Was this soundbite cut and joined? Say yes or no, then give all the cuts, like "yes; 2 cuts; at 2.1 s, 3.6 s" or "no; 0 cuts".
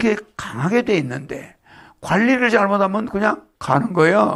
no; 0 cuts